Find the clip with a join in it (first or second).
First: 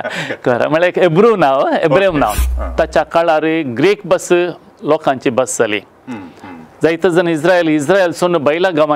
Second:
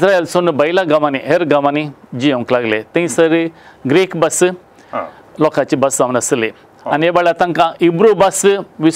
first